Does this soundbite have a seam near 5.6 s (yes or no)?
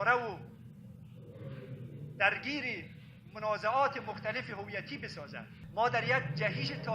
yes